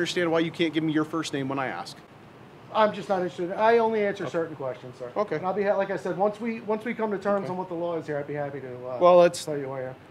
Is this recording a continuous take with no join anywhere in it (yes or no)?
yes